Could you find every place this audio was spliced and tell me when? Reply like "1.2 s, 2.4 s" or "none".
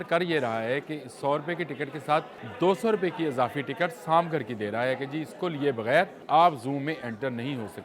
2.4 s, 6.2 s